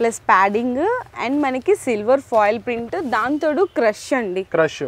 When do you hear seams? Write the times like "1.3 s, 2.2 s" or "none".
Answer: none